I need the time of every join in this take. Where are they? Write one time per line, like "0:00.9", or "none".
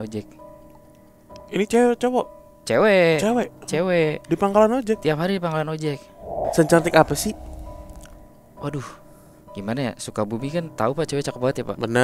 0:06.4